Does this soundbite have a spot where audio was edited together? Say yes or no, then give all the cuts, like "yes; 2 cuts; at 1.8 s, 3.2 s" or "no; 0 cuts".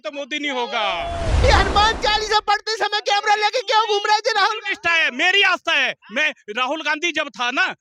yes; 1 cut; at 1.4 s